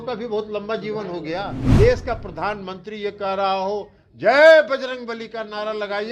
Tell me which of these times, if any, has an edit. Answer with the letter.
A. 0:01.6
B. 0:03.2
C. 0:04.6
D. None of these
A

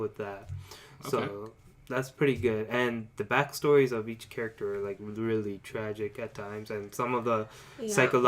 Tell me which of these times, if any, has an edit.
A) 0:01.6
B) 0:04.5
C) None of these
A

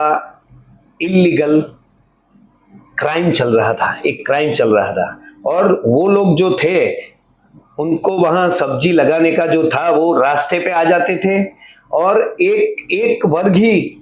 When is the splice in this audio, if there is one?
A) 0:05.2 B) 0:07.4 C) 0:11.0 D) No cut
D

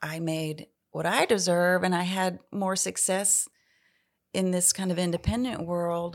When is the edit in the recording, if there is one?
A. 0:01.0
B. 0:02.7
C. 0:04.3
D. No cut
D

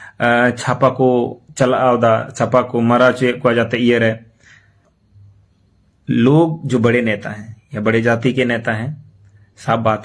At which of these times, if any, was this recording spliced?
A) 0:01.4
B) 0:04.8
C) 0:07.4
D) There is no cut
B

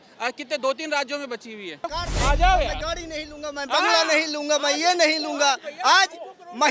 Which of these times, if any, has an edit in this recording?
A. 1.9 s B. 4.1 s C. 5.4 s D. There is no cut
A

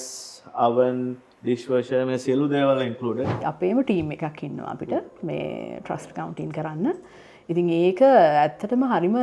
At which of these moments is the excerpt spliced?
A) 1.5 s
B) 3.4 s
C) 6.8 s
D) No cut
B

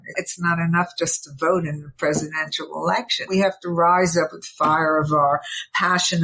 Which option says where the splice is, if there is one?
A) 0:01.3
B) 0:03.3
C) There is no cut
B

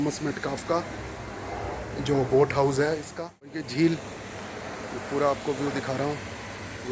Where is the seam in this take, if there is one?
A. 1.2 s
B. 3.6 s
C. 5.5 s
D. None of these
B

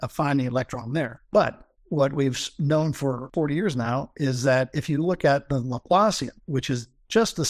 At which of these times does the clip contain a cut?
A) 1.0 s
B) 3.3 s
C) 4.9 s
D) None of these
B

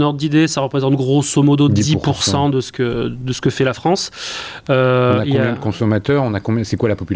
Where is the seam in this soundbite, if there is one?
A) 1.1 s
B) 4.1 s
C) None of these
C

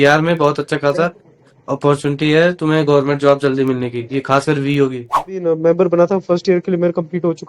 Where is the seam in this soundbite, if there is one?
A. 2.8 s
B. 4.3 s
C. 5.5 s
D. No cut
C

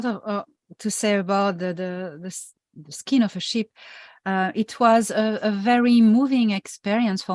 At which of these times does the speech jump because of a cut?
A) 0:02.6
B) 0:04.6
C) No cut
A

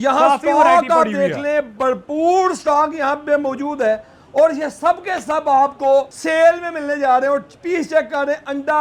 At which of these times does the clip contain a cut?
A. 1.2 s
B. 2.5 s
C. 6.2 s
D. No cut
C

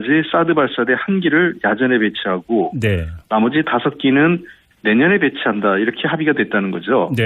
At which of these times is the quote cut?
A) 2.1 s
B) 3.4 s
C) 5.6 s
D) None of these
C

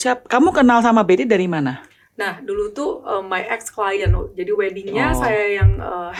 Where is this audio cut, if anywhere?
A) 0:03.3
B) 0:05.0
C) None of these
C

